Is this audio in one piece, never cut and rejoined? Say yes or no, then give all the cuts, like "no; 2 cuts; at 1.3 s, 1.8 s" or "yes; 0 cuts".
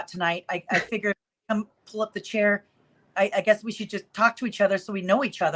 yes; 0 cuts